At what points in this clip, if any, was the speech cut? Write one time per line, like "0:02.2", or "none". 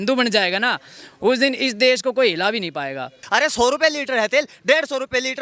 0:03.2